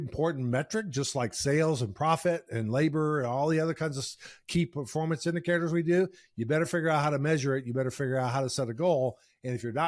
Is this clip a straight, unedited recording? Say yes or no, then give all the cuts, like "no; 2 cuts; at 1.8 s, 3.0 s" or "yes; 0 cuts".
yes; 0 cuts